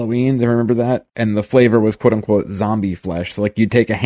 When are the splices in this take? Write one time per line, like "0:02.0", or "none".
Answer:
0:01.1